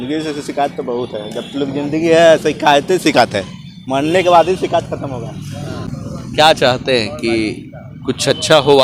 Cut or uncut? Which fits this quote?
cut